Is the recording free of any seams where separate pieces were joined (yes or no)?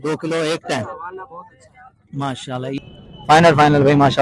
no